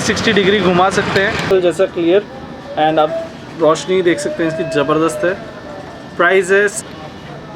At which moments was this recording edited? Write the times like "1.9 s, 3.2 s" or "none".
1.4 s, 6.8 s